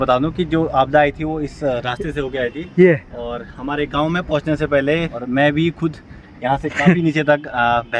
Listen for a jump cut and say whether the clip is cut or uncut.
cut